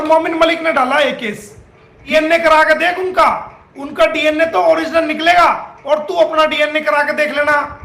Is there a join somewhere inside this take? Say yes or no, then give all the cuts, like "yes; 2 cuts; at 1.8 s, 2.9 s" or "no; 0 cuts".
yes; 1 cut; at 2.1 s